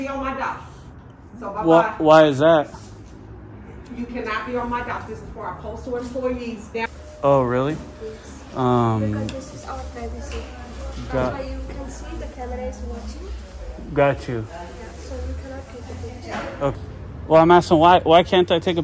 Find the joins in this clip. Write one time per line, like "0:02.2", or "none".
0:06.9
0:16.7